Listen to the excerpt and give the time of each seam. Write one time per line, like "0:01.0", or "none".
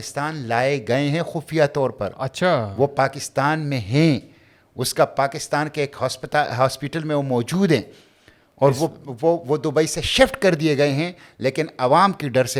none